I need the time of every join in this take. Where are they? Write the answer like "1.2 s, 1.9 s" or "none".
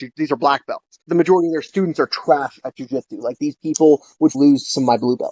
4.3 s